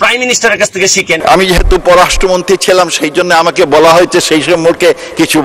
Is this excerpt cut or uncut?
cut